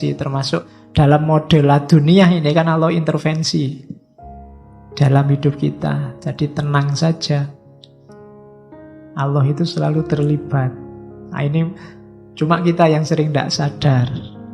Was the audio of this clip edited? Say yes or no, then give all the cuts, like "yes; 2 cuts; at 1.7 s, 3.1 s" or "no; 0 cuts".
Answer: no; 0 cuts